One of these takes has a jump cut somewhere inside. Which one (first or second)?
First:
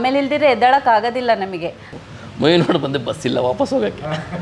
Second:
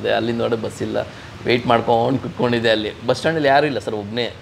first